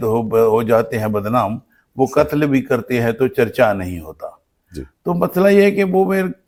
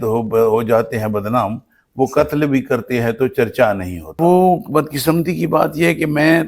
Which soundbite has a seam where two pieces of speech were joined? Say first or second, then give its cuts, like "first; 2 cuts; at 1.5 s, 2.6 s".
second; 1 cut; at 4.2 s